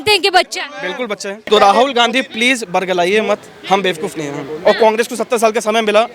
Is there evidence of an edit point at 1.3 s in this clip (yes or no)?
yes